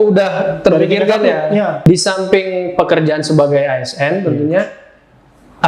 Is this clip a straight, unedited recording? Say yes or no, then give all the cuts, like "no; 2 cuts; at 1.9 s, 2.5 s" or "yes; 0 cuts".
no; 1 cut; at 1.8 s